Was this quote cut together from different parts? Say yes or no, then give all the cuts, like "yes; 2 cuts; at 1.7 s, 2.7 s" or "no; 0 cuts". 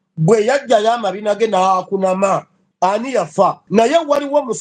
yes; 2 cuts; at 2.6 s, 3.6 s